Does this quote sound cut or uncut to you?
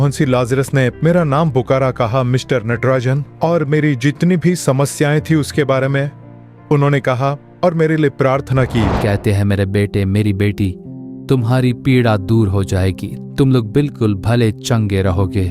cut